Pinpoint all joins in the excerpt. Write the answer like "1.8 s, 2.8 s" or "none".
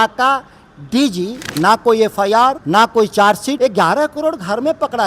1.4 s, 2.6 s, 3.6 s